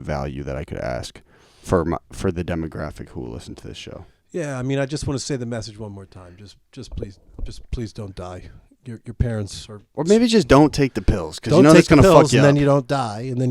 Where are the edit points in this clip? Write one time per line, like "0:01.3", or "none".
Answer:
none